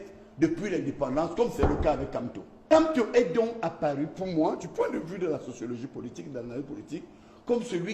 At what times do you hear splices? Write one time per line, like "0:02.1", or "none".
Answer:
0:02.7

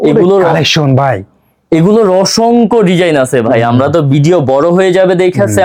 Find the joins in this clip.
none

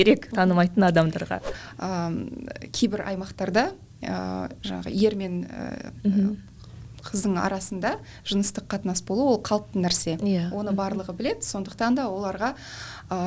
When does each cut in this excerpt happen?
0:01.6

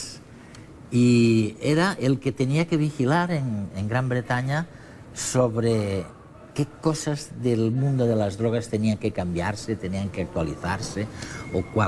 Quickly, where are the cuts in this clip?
0:10.0

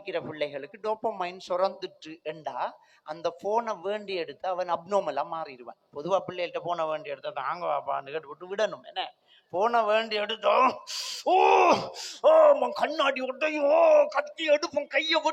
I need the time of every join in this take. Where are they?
none

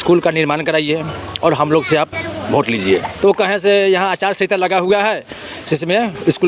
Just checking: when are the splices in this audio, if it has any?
0:03.1

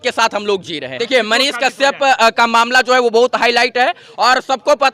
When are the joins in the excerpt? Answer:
0:00.9

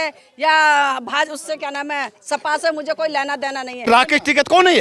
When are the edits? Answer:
0:03.9

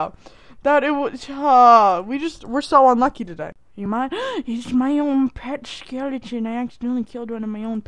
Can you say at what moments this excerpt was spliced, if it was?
0:03.5

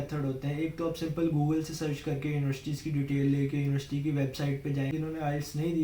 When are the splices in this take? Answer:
0:04.9

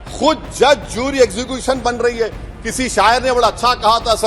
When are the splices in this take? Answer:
none

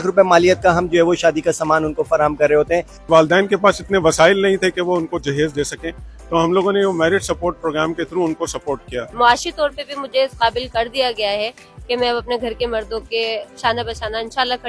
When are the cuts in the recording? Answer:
0:03.1
0:09.1

